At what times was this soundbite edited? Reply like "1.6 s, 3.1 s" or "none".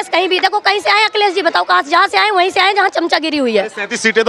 none